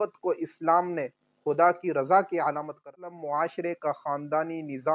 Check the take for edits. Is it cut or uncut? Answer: cut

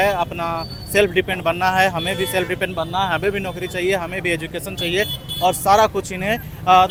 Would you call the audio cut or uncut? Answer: uncut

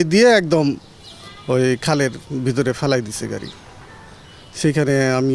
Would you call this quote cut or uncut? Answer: uncut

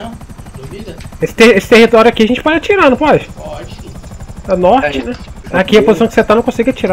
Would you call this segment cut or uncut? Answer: cut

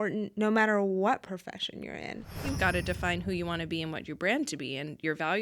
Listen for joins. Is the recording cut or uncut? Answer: cut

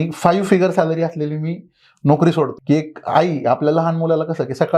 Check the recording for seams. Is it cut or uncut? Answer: cut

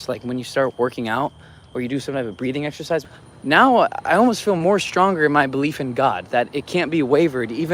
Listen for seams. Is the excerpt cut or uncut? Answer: cut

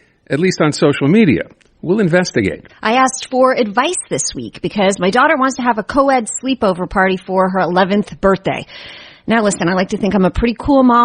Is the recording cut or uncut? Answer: cut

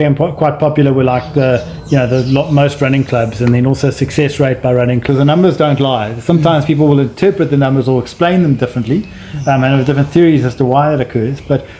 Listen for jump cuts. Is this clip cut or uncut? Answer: cut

